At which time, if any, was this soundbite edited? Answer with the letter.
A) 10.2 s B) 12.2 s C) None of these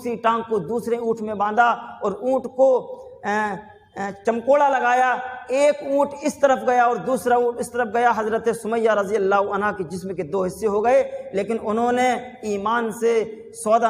C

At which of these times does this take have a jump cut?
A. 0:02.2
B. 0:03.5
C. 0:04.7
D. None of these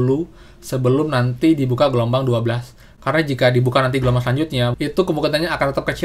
C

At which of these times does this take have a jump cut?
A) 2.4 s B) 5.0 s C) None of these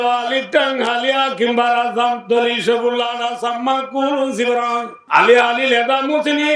B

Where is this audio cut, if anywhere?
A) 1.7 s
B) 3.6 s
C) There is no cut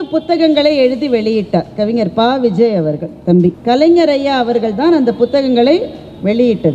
B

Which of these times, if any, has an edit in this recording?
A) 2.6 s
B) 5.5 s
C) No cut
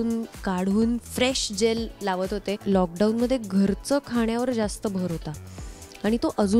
A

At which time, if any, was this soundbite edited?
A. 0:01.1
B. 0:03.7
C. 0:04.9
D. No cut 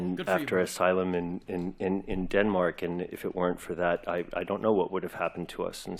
D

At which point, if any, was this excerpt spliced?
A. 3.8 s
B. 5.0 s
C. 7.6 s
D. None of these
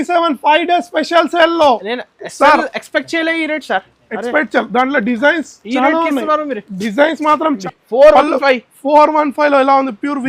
C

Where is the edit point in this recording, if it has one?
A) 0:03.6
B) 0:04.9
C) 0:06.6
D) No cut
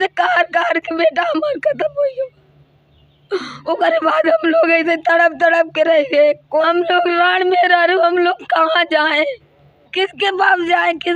C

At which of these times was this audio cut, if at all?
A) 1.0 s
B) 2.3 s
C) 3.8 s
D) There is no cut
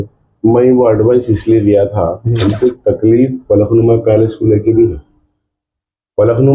B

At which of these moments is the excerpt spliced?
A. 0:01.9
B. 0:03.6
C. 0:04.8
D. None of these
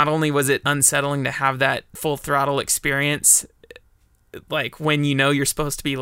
A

